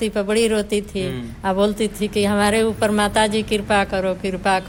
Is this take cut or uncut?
uncut